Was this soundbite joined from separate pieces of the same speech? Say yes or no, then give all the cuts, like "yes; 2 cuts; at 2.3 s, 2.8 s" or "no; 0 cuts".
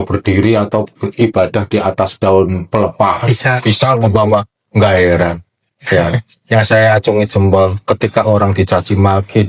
no; 0 cuts